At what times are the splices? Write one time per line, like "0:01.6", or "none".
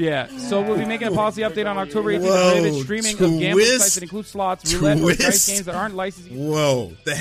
0:06.2